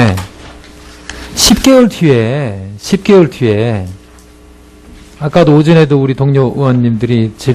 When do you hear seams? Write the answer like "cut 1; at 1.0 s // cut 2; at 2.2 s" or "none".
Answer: cut 1; at 6.5 s